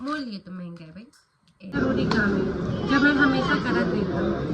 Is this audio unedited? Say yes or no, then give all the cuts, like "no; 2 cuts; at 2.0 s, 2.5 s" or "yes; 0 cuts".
no; 1 cut; at 1.7 s